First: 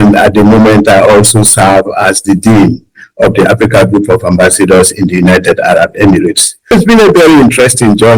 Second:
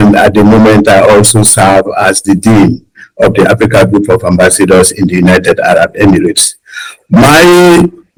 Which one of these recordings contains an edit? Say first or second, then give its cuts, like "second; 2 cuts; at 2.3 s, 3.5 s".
first; 1 cut; at 6.7 s